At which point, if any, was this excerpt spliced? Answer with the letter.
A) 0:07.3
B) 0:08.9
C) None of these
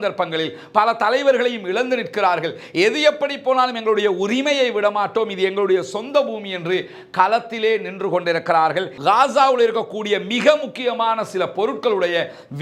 B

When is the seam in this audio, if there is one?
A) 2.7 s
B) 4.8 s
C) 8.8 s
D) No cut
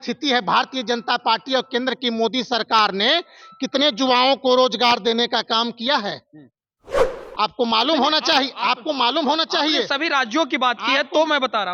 D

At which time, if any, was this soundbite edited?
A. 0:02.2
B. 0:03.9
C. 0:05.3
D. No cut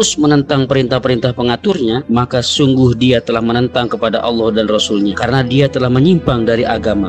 D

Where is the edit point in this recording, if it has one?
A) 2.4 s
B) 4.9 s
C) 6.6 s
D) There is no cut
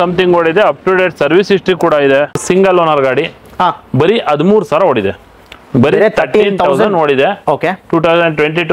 A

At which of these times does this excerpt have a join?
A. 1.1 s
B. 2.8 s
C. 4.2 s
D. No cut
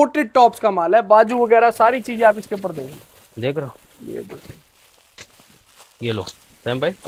D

